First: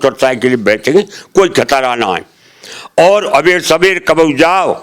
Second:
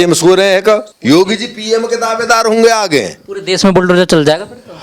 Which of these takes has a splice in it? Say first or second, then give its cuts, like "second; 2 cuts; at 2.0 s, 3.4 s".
second; 1 cut; at 0.9 s